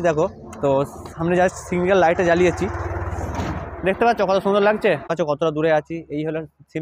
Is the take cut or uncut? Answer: cut